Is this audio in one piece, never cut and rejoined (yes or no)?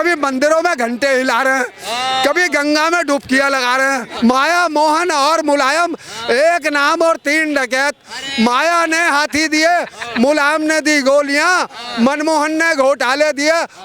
no